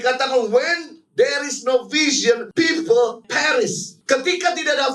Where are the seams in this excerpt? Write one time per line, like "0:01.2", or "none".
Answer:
0:02.5
0:03.4

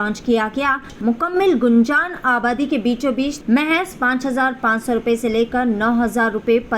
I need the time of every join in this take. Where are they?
0:00.9
0:03.4

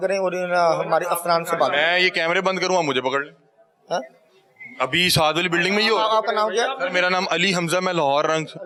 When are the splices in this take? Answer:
none

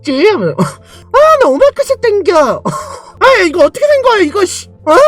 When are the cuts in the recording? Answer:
0:01.0
0:03.1

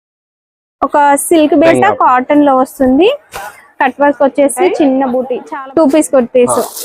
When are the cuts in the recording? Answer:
0:01.7
0:05.4

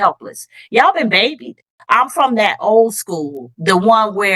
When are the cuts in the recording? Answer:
0:01.7

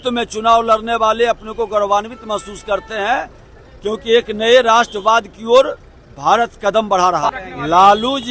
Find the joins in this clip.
0:07.4

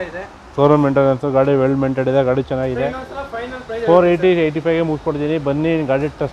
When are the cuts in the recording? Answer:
none

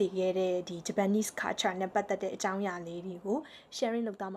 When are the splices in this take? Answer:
none

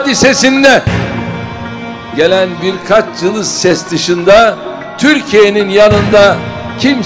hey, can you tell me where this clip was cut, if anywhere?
none

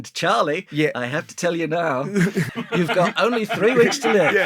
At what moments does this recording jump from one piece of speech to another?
0:02.5

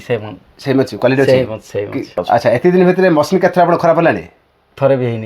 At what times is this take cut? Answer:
0:02.2

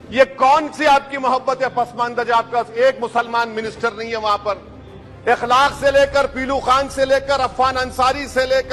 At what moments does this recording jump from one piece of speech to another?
none

